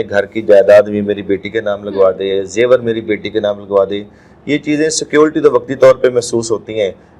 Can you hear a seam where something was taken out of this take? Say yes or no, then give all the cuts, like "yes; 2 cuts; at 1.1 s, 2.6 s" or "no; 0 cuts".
no; 0 cuts